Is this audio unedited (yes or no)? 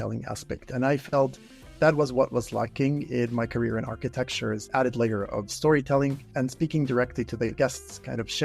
no